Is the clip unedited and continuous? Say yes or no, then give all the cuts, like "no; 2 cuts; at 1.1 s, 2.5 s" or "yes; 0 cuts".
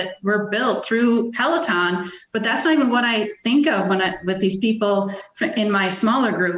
yes; 0 cuts